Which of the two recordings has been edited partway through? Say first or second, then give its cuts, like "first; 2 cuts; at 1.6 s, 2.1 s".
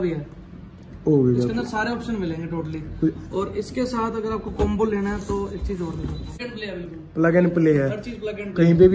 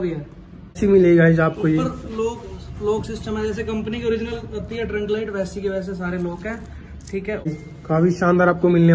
second; 2 cuts; at 0.8 s, 7.5 s